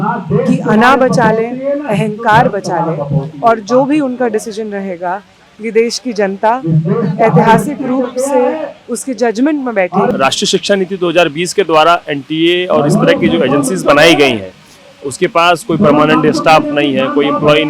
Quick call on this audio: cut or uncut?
cut